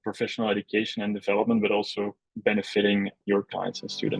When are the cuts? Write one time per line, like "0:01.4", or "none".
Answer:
0:02.2
0:03.2